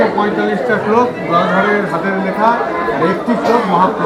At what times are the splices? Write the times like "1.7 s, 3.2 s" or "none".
none